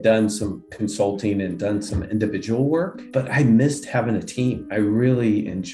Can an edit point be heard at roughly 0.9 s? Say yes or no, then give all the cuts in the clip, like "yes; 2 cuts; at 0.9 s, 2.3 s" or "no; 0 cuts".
no; 2 cuts; at 3.0 s, 4.6 s